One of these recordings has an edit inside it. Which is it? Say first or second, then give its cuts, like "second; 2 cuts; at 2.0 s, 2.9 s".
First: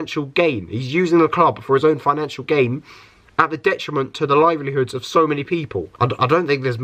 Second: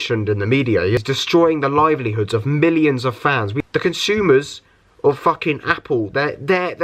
second; 2 cuts; at 1.0 s, 3.5 s